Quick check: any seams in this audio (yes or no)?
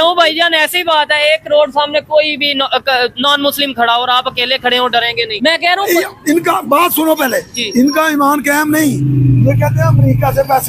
yes